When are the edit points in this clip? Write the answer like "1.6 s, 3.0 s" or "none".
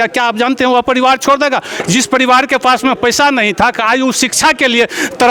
none